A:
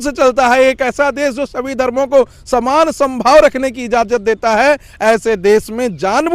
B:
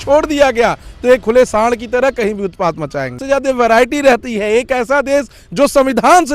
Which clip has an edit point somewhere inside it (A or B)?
B